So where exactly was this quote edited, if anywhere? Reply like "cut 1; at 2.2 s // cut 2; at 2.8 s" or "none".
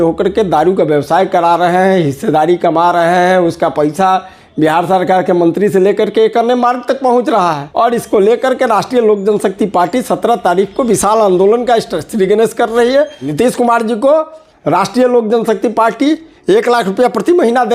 cut 1; at 7.6 s // cut 2; at 13.3 s